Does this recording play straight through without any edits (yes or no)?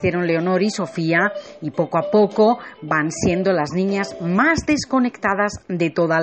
yes